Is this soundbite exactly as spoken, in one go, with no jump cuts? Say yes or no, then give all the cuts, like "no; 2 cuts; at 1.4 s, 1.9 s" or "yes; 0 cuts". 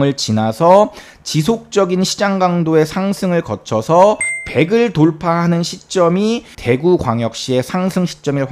no; 2 cuts; at 4.3 s, 6.5 s